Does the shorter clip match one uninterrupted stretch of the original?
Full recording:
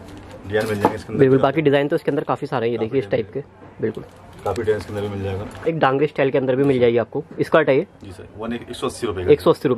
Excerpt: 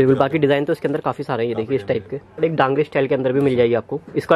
no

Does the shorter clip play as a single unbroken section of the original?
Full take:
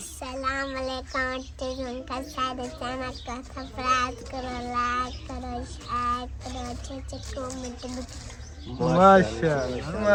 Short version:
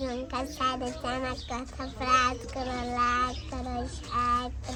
yes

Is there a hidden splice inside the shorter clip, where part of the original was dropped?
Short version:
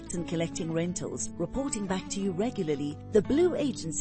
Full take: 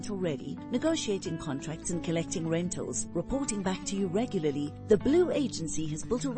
no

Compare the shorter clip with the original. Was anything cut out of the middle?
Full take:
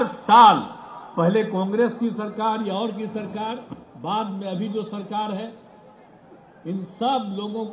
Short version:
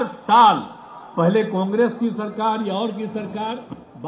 no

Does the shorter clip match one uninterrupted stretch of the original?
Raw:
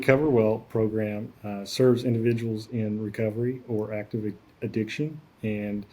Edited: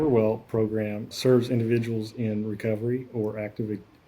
no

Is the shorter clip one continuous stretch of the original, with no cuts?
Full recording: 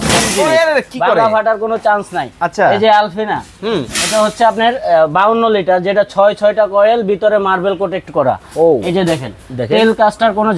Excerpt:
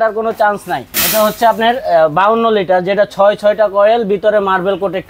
no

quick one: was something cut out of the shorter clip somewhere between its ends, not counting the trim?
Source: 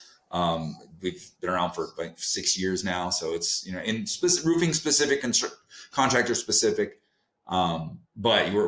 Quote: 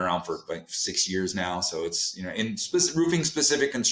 no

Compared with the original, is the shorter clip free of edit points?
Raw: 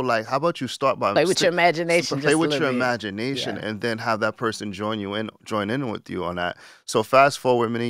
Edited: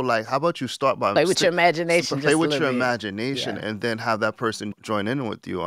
no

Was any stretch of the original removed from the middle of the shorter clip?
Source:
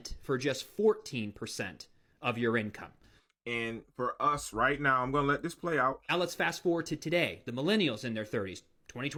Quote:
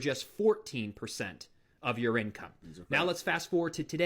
yes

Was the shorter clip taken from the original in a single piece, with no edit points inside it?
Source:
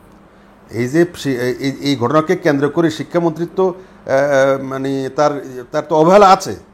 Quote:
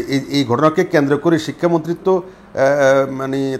yes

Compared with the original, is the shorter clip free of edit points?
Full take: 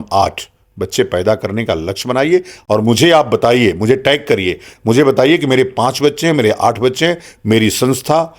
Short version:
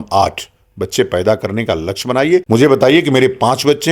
no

